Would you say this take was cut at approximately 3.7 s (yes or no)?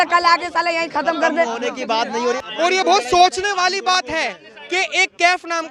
no